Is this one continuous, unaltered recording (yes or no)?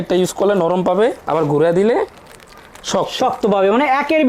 yes